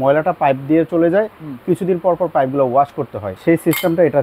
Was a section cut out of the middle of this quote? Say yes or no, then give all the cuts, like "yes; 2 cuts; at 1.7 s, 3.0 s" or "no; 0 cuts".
yes; 1 cut; at 3.2 s